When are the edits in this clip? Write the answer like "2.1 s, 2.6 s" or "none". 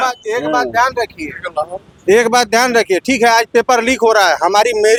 none